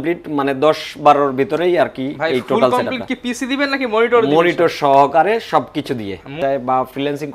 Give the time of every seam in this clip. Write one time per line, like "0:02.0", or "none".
0:06.3